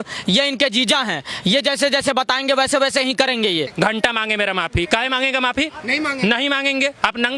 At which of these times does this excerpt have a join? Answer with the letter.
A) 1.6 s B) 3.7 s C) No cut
B